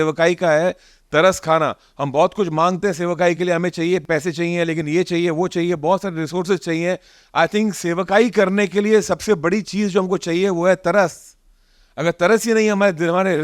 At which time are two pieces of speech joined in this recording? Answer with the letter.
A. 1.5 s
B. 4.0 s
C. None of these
B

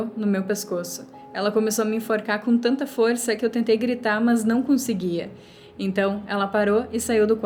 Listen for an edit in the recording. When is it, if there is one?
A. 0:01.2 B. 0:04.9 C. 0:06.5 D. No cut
D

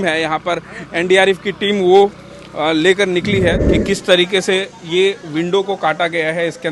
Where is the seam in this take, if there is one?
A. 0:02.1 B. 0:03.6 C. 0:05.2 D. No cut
B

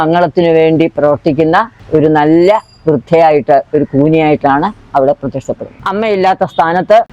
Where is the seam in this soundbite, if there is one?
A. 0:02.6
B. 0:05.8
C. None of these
B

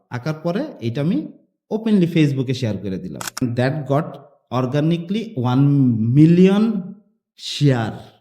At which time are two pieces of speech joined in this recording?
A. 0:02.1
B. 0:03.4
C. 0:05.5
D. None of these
B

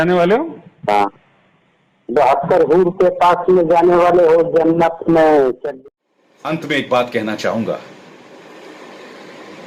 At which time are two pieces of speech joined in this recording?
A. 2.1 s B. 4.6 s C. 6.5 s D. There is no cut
C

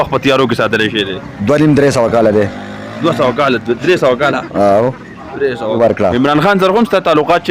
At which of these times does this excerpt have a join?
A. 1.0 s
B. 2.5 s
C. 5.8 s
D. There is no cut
C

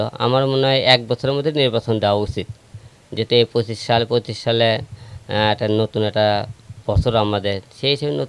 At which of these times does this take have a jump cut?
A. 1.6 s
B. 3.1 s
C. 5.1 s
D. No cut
D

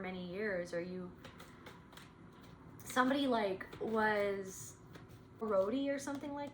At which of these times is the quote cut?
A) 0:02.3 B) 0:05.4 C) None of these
B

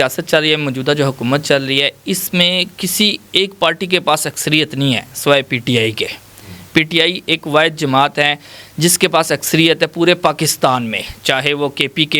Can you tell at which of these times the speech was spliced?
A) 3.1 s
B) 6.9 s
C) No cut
C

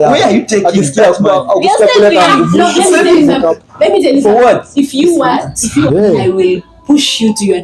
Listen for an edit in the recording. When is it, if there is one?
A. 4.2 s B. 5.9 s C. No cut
B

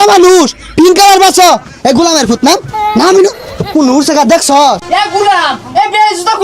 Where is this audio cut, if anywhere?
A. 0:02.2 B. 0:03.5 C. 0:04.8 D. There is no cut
C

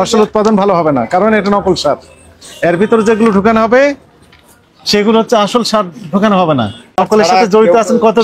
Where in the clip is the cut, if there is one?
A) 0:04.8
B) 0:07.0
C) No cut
B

